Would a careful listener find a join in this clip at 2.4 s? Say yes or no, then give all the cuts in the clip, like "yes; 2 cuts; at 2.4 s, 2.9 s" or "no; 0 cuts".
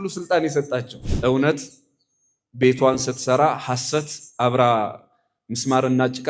no; 1 cut; at 1.0 s